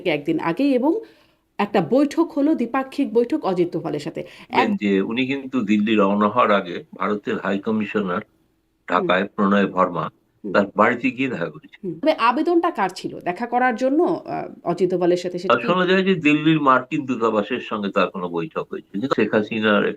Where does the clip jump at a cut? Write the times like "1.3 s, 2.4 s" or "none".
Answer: 4.6 s, 12.0 s, 15.5 s, 19.1 s